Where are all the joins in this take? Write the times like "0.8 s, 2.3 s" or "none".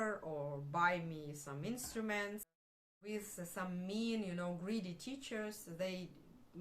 2.7 s